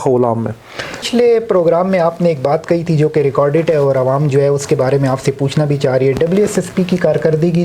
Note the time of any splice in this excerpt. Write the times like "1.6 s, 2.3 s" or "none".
1.0 s